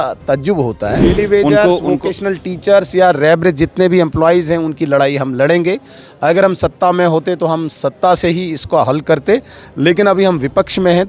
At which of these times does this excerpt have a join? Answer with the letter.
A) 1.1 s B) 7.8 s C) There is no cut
A